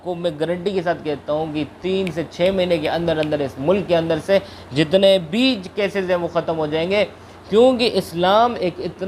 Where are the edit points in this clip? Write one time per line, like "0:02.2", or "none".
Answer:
none

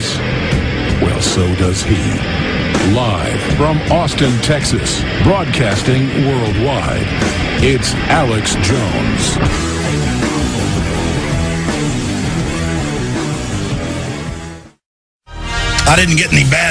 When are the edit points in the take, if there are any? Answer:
0:07.2

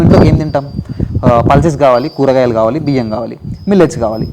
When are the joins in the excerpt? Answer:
none

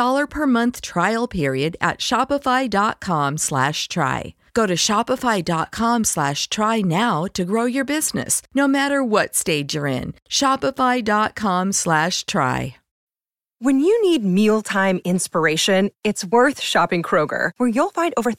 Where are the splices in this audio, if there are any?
0:12.8

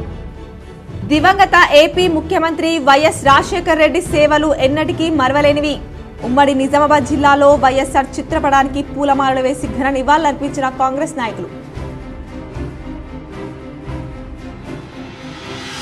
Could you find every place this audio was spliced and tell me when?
0:01.0

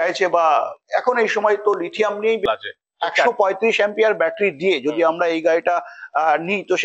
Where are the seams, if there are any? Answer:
0:02.4

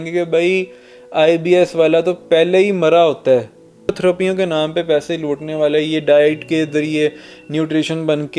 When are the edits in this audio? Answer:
0:04.0

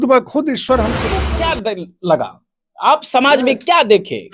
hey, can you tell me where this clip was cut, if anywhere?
0:01.3

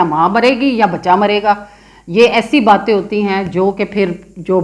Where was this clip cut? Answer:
none

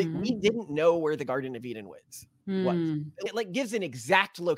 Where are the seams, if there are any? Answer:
0:03.3

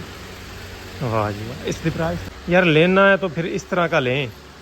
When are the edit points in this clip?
0:02.2

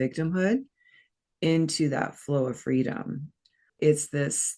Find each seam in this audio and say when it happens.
0:03.4

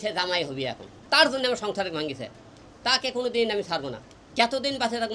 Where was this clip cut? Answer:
0:01.0

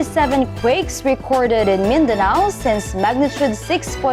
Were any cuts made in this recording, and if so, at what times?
none

